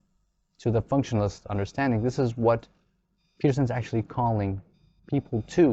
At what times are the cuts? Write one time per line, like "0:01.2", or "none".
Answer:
none